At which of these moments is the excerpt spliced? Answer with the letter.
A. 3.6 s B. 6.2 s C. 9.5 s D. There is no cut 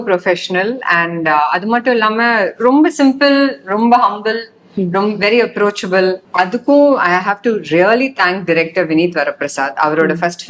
B